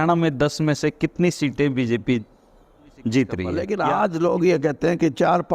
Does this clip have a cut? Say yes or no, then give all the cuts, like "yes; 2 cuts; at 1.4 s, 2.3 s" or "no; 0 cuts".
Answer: yes; 1 cut; at 3.6 s